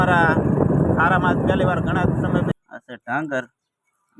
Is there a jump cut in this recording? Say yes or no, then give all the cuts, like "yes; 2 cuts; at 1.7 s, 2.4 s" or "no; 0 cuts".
yes; 1 cut; at 2.5 s